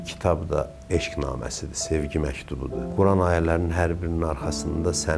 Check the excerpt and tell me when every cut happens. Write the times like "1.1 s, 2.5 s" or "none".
2.9 s